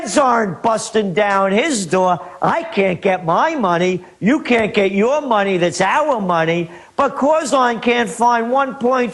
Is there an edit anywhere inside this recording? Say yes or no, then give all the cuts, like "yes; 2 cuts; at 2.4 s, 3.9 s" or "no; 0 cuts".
yes; 1 cut; at 2.1 s